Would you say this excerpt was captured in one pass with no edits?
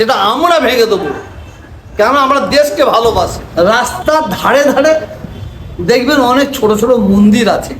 no; 1 cut; at 3.4 s

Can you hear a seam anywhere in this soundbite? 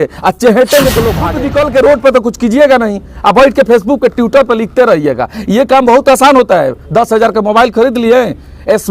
yes; 1 cut; at 1.3 s

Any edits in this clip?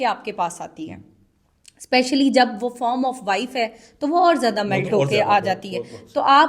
no; 0 cuts

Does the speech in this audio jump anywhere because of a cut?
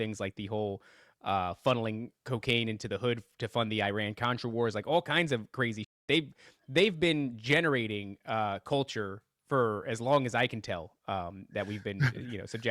no; 0 cuts

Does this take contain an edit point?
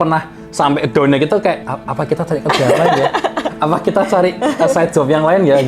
yes; 1 cut; at 1.8 s

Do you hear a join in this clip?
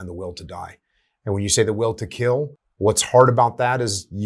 yes; 1 cut; at 2.6 s

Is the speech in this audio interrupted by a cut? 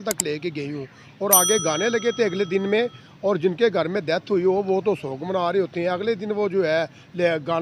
no; 0 cuts

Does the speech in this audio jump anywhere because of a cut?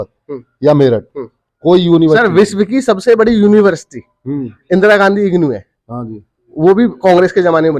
no; 0 cuts

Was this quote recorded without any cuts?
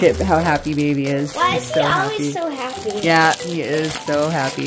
no; 1 cut; at 1.3 s

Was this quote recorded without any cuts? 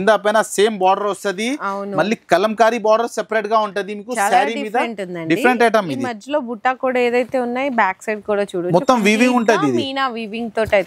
yes; 0 cuts

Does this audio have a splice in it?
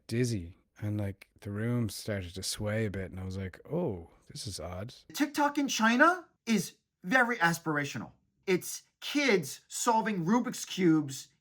yes; 3 cuts; at 5.1 s, 6.3 s, 8.4 s

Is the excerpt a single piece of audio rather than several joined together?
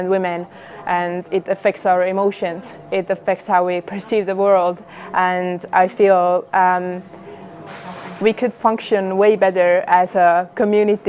yes; 0 cuts

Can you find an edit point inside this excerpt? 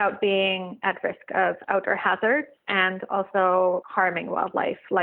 yes; 2 cuts; at 2.6 s, 3.9 s

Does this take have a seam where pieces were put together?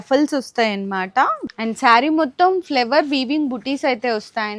yes; 1 cut; at 1.4 s

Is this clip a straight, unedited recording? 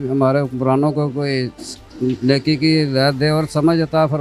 yes; 0 cuts

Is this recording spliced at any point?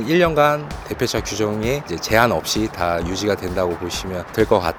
no; 0 cuts

